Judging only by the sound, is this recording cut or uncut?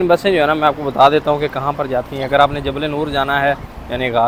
uncut